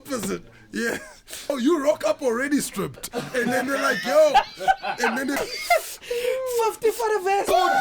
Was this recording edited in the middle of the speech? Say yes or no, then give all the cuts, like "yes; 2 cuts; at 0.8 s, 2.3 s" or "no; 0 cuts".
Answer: yes; 2 cuts; at 1.5 s, 5.4 s